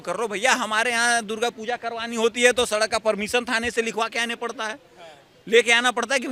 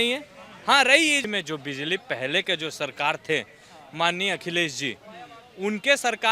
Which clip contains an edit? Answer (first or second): second